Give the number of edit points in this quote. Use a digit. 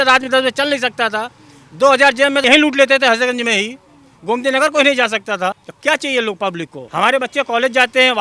2